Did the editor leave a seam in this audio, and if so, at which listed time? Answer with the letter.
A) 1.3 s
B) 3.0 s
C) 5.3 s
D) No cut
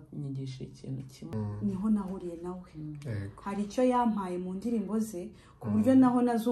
A